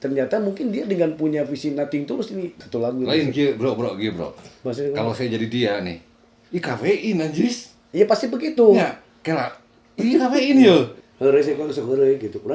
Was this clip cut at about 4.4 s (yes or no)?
no